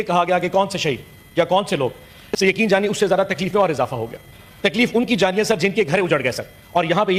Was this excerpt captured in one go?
yes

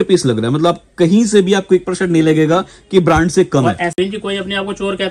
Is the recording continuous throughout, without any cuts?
no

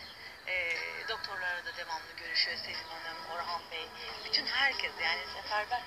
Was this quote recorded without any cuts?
yes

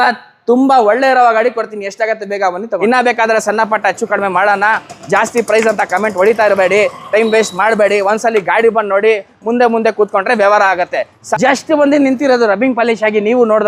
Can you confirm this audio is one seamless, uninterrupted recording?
no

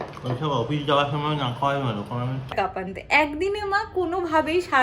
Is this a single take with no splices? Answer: no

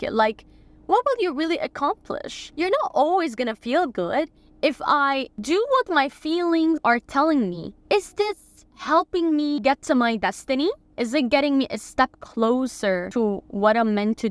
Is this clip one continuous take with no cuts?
no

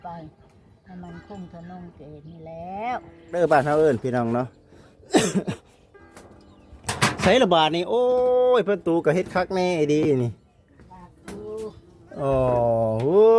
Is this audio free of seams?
no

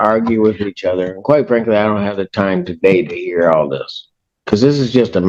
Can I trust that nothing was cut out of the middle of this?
yes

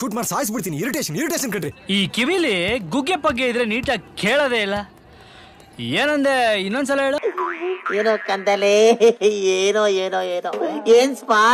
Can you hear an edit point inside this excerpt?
yes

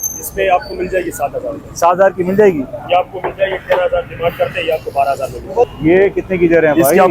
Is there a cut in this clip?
yes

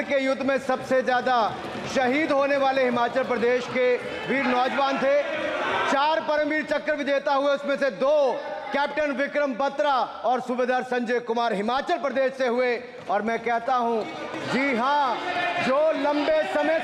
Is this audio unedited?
yes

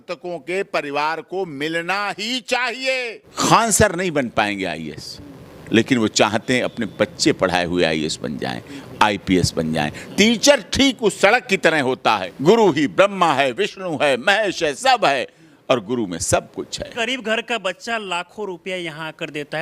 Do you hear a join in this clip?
yes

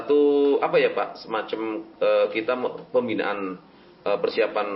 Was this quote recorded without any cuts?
yes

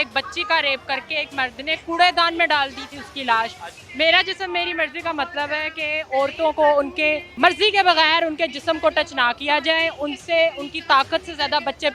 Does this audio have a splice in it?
yes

